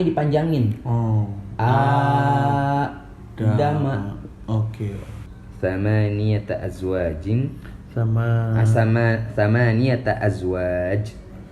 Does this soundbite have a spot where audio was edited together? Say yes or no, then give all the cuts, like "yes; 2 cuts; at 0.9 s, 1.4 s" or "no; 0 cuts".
yes; 1 cut; at 5.2 s